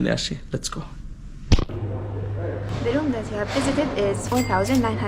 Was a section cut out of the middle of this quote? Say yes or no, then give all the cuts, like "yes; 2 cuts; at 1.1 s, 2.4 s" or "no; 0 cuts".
yes; 2 cuts; at 2.7 s, 4.2 s